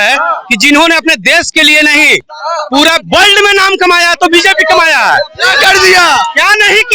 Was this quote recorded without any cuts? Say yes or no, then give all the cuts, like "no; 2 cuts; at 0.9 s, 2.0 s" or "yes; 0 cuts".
yes; 0 cuts